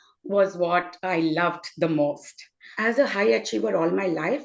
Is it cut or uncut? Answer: cut